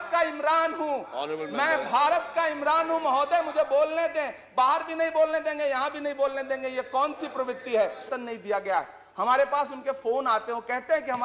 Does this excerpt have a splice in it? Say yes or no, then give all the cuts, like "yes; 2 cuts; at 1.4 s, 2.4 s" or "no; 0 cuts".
yes; 1 cut; at 8.1 s